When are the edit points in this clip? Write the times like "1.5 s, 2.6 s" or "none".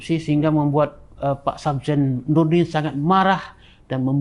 none